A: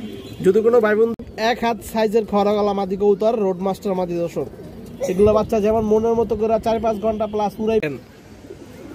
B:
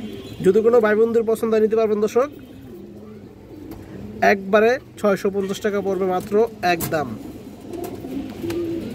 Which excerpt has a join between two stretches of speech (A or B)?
A